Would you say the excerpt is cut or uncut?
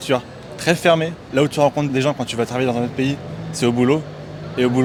uncut